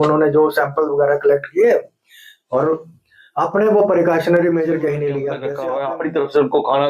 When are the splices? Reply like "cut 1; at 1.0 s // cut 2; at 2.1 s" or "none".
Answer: cut 1; at 5.5 s

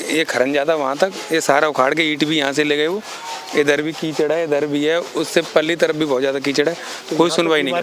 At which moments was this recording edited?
none

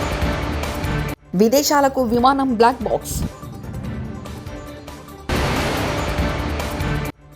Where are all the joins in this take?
cut 1; at 1.2 s

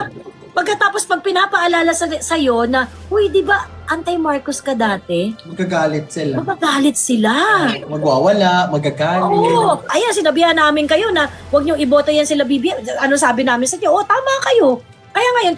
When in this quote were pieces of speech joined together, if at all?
cut 1; at 9.9 s

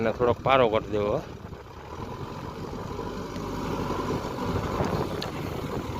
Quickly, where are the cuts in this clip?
none

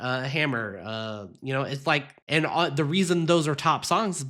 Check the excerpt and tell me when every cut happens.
cut 1; at 2.1 s

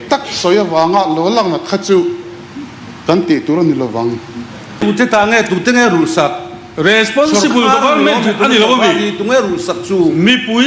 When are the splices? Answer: cut 1; at 4.8 s

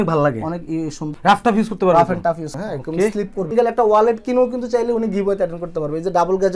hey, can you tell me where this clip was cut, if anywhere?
cut 1; at 1.1 s // cut 2; at 2.6 s // cut 3; at 3.5 s

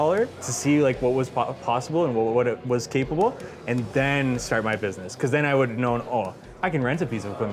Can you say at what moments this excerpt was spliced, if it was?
none

